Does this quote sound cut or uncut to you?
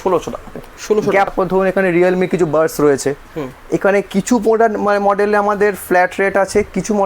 cut